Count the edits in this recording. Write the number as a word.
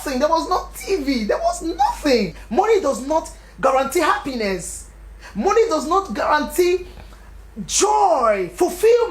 one